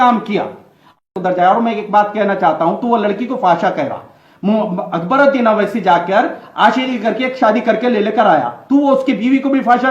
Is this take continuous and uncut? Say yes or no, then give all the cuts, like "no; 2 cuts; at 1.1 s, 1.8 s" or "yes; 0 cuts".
no; 1 cut; at 1.0 s